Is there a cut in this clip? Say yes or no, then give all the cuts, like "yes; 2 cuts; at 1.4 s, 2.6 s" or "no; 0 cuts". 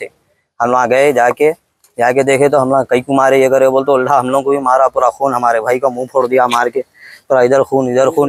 no; 0 cuts